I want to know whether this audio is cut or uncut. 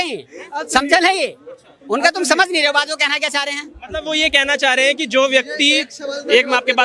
uncut